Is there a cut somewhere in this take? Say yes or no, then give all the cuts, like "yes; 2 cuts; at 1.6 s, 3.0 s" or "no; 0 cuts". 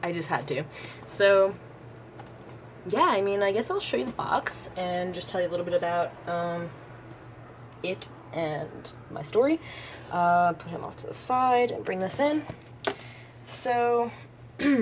yes; 1 cut; at 3.8 s